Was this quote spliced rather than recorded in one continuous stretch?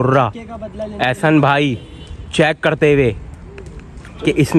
no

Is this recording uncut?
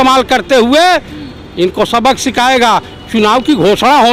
yes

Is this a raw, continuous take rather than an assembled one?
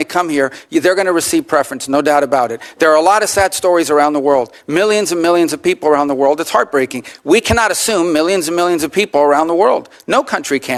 yes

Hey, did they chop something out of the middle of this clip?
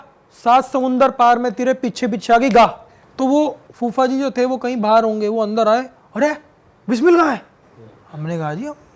yes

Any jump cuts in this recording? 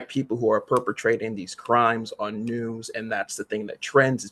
no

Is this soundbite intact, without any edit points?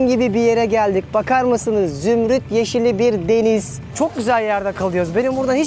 no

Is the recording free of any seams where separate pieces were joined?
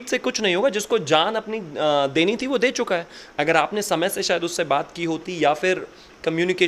yes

